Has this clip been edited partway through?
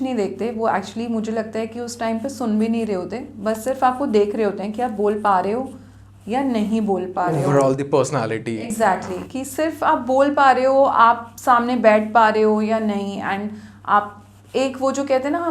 no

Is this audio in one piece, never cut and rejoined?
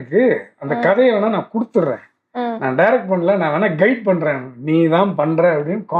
yes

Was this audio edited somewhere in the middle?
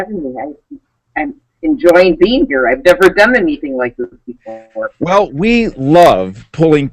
yes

